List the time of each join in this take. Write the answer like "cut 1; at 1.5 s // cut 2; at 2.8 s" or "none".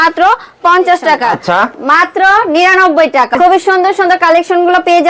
cut 1; at 1.3 s // cut 2; at 3.4 s